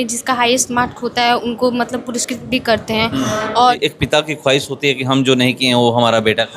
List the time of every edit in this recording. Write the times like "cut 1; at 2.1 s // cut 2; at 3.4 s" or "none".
cut 1; at 3.8 s